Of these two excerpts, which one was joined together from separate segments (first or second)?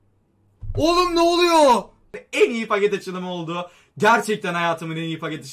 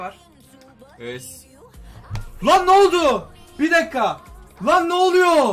first